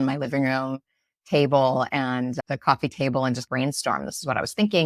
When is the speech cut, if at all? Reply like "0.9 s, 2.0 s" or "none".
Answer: none